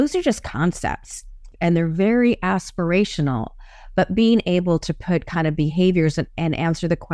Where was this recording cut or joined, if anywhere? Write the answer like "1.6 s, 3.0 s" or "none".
1.5 s

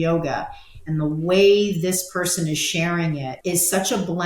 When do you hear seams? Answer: 3.3 s

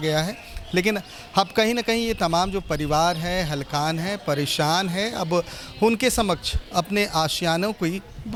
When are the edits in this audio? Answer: none

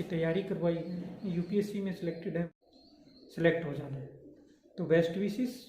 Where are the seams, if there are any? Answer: 2.5 s

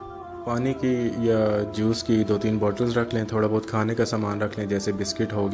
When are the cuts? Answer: none

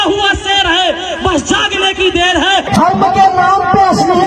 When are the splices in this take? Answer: 2.7 s

